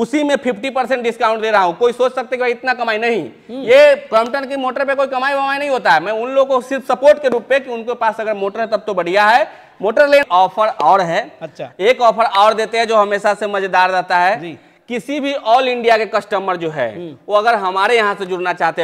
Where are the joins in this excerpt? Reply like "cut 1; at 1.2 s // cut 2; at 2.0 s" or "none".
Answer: cut 1; at 10.2 s